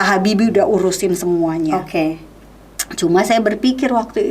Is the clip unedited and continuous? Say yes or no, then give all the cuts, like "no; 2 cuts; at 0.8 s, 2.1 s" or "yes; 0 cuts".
yes; 0 cuts